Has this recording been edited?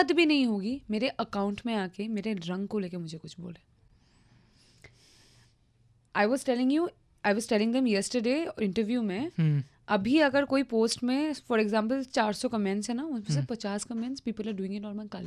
no; 0 cuts

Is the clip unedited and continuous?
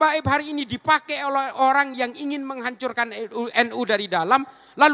yes; 0 cuts

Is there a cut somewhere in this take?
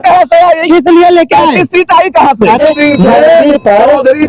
yes; 1 cut; at 2.6 s

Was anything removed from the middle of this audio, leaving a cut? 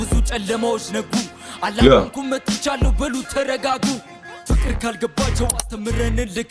no; 0 cuts

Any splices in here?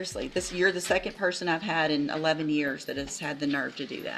no; 0 cuts

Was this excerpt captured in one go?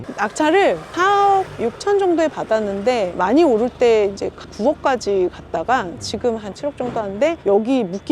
no; 1 cut; at 4.4 s

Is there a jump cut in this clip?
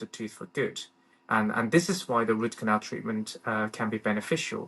no; 0 cuts

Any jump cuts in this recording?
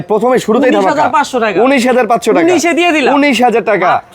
no; 0 cuts

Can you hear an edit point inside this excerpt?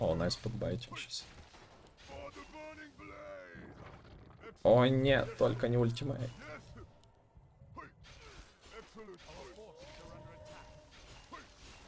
no; 0 cuts

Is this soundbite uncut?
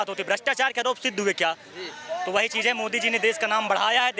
yes; 0 cuts

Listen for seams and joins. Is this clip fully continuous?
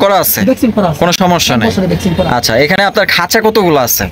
yes; 0 cuts

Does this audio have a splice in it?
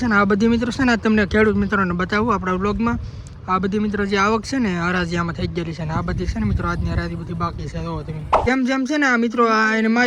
yes; 1 cut; at 8.5 s

